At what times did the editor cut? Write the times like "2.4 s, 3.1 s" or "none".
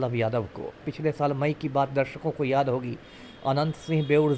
0.9 s

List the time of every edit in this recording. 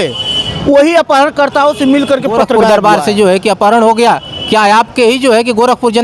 2.6 s

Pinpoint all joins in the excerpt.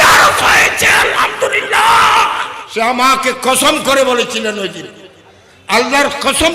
2.5 s

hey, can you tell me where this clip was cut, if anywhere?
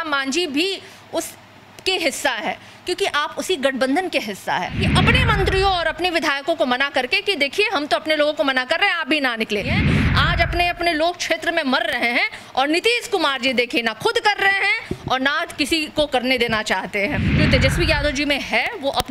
4.8 s, 9.8 s, 17.3 s

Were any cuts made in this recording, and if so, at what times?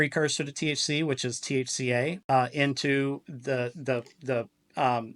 2.2 s

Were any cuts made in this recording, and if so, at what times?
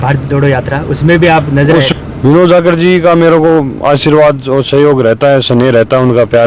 1.9 s

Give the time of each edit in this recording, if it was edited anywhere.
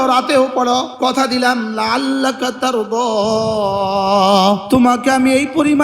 0.9 s, 4.6 s

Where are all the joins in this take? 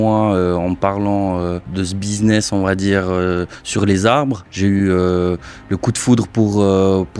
1.6 s, 4.5 s

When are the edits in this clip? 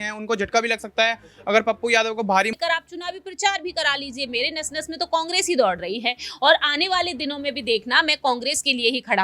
2.5 s

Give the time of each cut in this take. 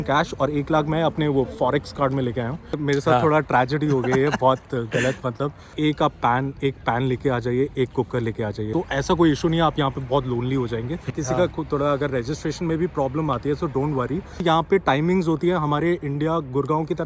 2.8 s, 5.7 s, 8.7 s, 11.1 s, 14.4 s

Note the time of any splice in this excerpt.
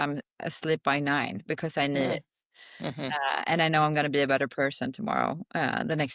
none

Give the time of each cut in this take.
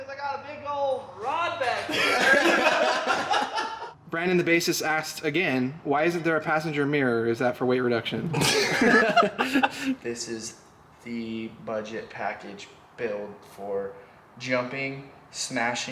3.9 s, 10.0 s

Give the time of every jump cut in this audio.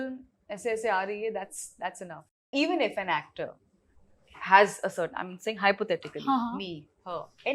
2.5 s

